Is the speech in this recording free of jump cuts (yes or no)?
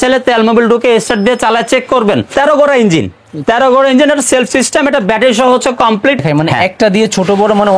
no